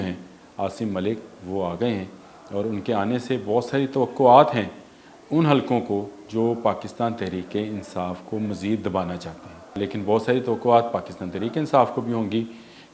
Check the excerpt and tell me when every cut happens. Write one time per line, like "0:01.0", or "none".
0:09.8